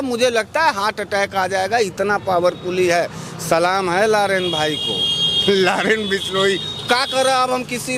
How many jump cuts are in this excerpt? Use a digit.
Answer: 0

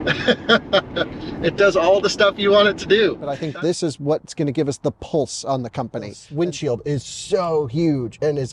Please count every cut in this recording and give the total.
2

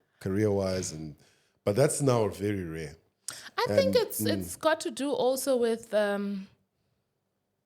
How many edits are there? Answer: 0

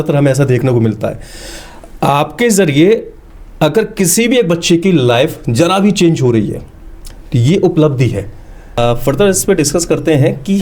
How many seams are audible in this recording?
1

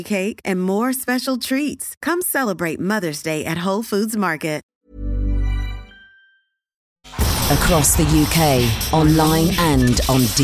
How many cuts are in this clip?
2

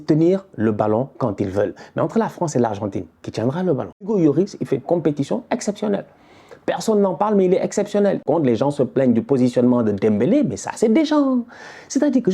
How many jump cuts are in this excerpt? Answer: 2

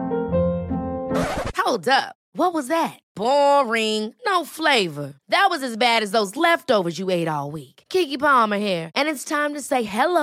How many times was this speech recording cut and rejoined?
0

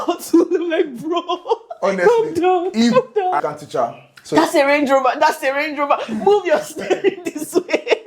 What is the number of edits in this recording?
1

